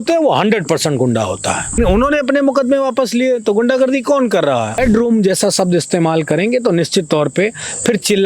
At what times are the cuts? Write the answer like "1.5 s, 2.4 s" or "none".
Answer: 1.8 s, 4.8 s